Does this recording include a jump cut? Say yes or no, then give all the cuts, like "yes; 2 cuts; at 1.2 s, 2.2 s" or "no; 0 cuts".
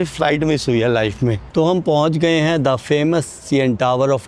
yes; 1 cut; at 1.4 s